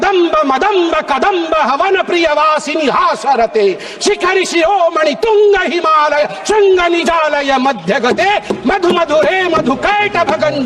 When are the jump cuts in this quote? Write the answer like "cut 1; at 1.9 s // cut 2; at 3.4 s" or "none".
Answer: none